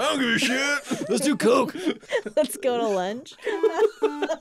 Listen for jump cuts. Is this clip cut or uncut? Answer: cut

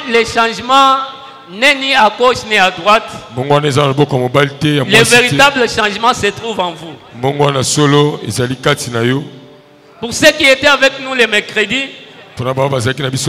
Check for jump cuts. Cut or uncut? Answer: uncut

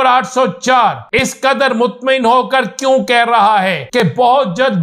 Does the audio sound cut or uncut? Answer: cut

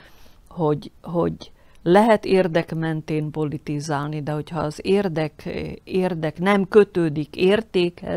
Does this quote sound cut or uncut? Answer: uncut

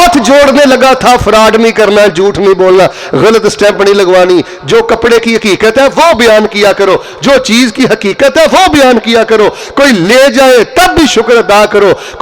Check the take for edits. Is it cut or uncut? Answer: uncut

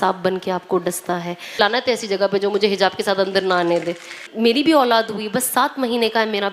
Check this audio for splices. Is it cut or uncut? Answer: cut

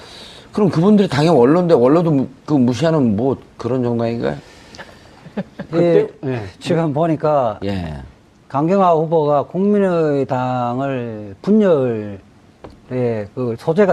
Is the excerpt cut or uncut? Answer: uncut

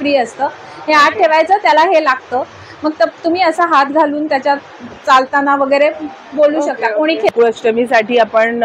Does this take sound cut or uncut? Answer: cut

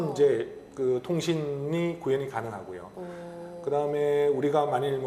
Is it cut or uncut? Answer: uncut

